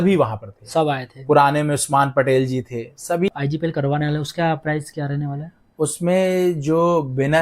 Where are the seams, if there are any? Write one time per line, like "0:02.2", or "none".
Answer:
0:03.3